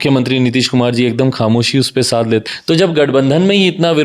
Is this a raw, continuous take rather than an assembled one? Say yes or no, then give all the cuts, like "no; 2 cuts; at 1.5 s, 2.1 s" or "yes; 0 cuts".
no; 1 cut; at 2.4 s